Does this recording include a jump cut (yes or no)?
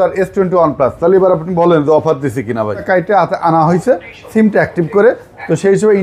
yes